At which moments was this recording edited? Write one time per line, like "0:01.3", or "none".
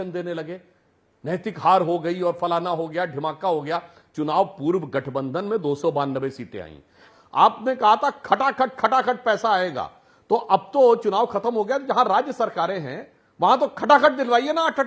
0:07.1